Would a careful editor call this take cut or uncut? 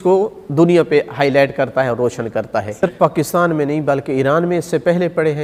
cut